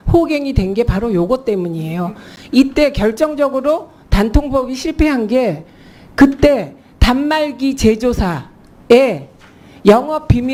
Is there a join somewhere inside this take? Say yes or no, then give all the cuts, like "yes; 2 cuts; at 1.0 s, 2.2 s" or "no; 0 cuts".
no; 0 cuts